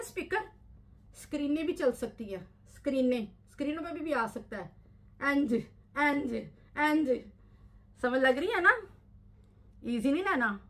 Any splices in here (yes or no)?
no